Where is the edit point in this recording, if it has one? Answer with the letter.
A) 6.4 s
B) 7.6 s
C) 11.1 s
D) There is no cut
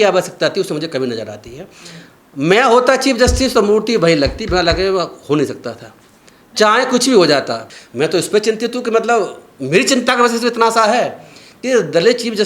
B